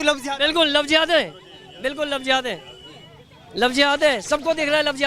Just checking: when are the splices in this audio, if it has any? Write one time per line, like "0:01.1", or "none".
none